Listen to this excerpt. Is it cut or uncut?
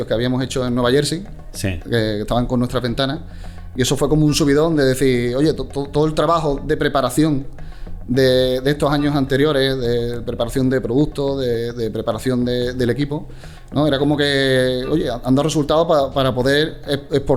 uncut